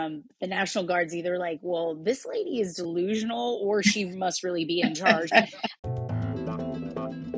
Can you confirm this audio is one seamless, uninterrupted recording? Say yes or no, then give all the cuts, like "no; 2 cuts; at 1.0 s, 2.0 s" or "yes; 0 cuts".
no; 1 cut; at 5.6 s